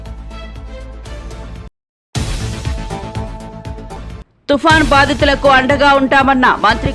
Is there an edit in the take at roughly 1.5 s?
yes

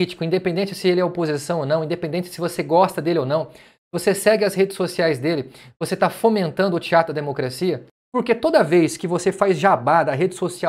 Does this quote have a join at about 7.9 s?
yes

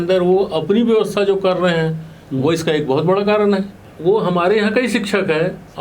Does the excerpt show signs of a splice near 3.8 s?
yes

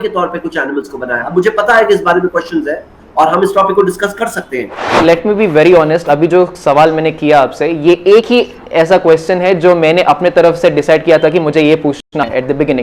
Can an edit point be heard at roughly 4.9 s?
yes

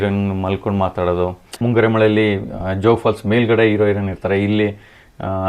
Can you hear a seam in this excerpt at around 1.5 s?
yes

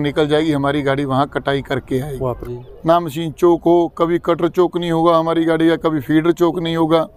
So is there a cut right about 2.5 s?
yes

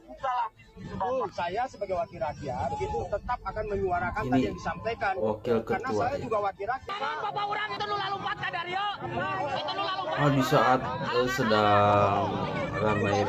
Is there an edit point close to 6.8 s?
yes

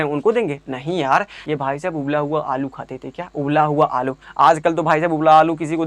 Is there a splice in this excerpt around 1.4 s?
yes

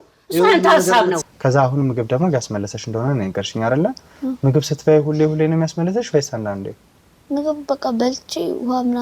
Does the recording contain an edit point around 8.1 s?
no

